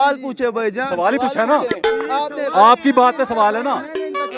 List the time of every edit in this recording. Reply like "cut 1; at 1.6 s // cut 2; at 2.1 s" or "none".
none